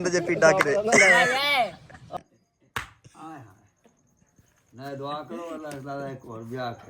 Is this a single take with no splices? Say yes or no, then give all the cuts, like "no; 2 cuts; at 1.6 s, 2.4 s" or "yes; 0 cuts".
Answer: no; 1 cut; at 2.1 s